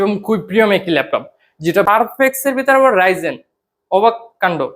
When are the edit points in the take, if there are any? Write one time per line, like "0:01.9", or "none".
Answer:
0:01.8

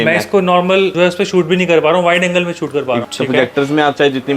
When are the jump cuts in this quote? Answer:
0:00.9
0:03.0

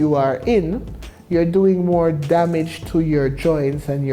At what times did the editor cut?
none

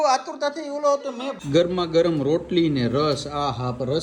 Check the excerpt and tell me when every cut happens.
0:01.4

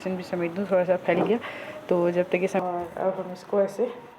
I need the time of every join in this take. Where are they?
0:02.6

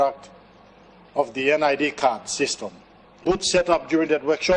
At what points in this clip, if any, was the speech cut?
0:03.2

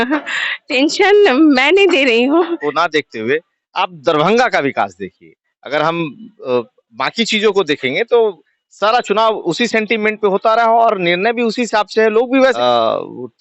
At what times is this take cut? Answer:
0:02.6
0:12.5

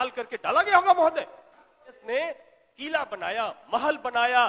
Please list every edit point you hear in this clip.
0:02.0

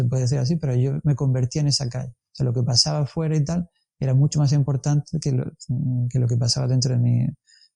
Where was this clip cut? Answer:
none

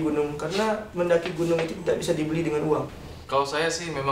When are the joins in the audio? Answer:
0:02.9

